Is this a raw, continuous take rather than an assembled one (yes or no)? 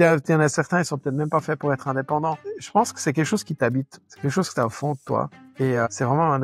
no